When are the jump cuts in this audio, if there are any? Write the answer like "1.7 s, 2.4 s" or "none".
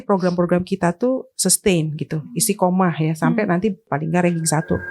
3.9 s